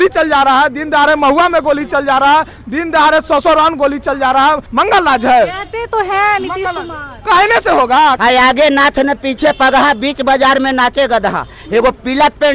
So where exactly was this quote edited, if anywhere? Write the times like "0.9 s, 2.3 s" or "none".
4.6 s, 8.2 s